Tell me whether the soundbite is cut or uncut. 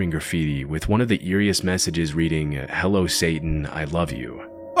uncut